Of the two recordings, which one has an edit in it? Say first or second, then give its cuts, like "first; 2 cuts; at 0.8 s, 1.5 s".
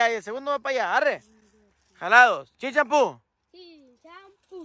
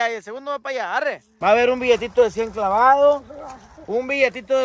second; 1 cut; at 1.3 s